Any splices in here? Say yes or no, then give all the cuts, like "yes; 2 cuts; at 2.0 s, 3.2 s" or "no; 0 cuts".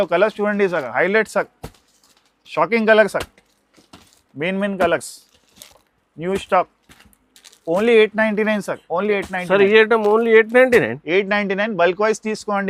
no; 0 cuts